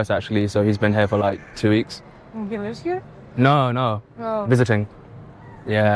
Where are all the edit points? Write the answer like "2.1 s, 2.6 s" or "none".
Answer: none